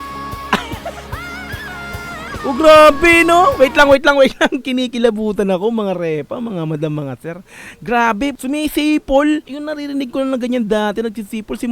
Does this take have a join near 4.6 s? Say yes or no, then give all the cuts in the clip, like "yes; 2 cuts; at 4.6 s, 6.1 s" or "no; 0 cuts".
no; 2 cuts; at 8.4 s, 9.6 s